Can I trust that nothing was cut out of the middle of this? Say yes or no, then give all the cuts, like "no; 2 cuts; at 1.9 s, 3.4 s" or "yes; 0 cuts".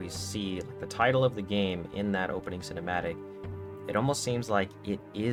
yes; 0 cuts